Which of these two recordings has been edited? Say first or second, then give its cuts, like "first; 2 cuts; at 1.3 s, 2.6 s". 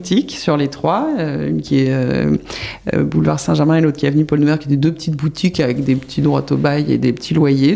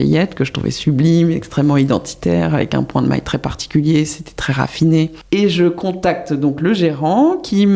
second; 1 cut; at 5.2 s